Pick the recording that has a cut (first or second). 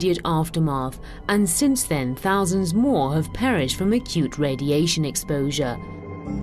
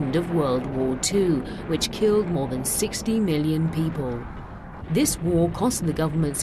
second